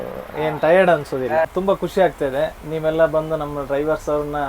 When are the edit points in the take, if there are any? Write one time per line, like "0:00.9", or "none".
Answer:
0:01.8